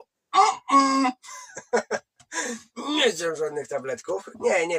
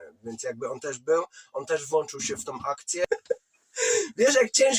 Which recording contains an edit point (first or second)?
second